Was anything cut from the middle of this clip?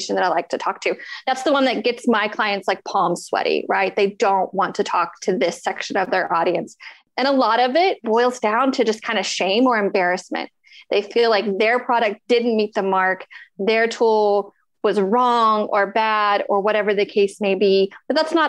yes; 1 cut; at 8.0 s

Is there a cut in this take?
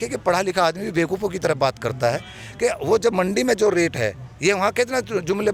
no; 0 cuts

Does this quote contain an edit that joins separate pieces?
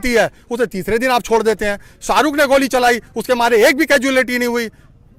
no; 0 cuts

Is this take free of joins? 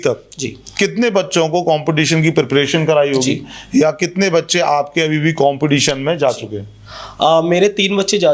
yes; 0 cuts

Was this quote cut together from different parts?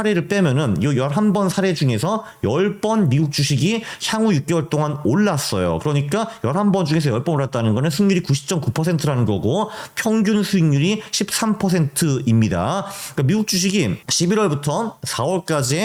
no; 0 cuts

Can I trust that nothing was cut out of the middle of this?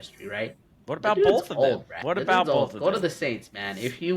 no; 1 cut; at 1.9 s

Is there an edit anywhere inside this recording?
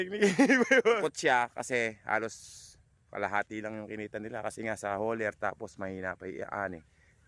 yes; 1 cut; at 1.0 s

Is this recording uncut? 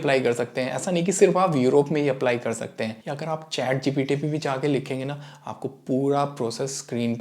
no; 1 cut; at 3.1 s

